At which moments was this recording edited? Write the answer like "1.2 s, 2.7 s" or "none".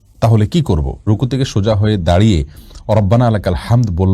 1.0 s